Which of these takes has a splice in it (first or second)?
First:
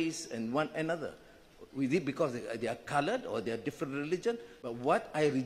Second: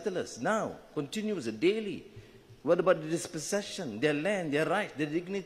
first